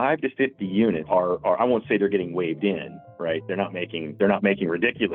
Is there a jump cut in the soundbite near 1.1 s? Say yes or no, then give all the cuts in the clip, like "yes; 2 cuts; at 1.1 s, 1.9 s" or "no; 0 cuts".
yes; 2 cuts; at 1.1 s, 4.1 s